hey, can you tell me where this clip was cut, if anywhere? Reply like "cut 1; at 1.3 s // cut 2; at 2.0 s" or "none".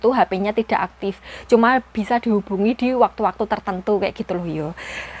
none